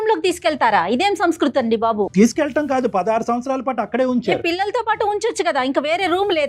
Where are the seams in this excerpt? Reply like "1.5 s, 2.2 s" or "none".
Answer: none